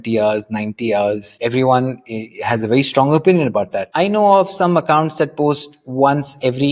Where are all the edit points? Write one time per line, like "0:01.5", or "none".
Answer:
0:01.3
0:03.8